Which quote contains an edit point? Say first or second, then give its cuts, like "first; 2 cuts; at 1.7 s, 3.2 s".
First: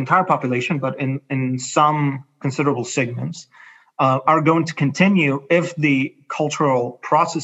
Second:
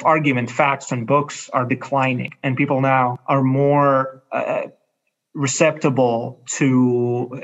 second; 2 cuts; at 2.3 s, 3.2 s